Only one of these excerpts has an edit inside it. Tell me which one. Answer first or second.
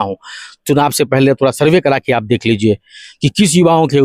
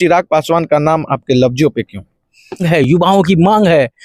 second